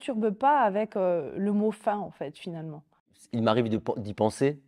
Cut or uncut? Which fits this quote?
cut